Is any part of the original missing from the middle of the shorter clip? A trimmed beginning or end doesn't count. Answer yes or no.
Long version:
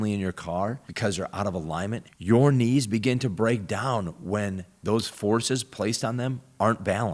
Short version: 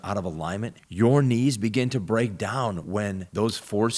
yes